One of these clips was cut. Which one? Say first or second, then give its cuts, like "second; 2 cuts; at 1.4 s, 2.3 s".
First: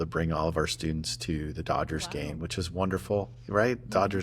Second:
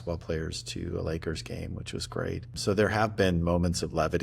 second; 1 cut; at 2.6 s